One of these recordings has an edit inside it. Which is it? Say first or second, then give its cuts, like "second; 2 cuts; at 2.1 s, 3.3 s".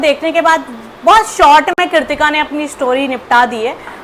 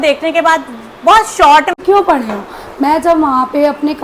second; 1 cut; at 1.8 s